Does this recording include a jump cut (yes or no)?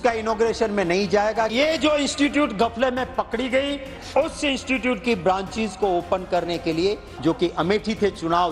yes